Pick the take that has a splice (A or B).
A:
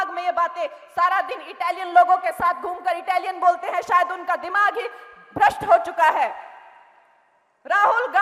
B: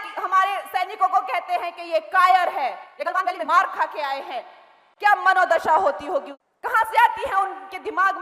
B